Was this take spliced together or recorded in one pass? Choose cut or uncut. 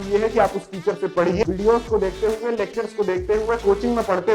cut